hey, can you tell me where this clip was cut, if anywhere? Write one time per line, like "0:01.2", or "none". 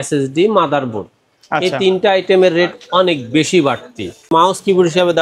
0:04.3